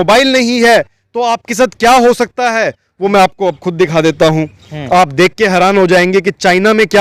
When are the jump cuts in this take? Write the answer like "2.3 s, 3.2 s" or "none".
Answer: none

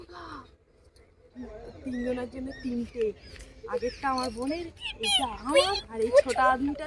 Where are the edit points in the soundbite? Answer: 1.5 s

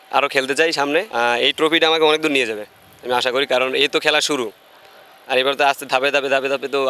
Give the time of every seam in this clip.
1.1 s

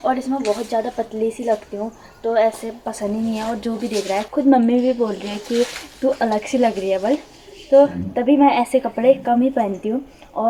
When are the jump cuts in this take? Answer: none

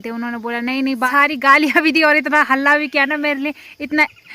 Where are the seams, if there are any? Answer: 1.1 s

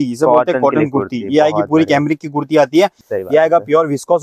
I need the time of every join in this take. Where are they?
3.0 s

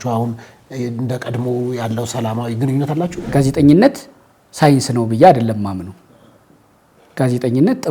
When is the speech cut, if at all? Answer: 3.3 s

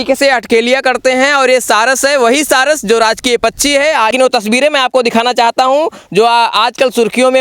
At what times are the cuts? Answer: 4.1 s

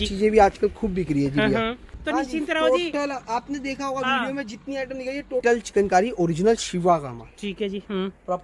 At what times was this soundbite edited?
2.0 s, 5.4 s

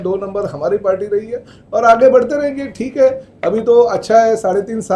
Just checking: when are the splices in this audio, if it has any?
none

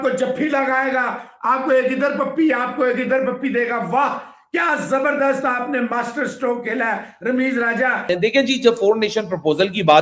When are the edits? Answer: 8.0 s

